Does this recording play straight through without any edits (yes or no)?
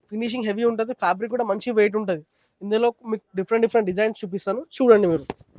yes